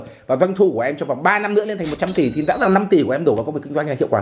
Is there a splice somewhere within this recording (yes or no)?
no